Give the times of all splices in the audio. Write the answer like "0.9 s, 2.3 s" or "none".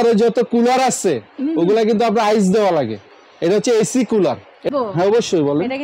4.7 s